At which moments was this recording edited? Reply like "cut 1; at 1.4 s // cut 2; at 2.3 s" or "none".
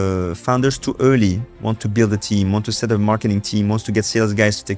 none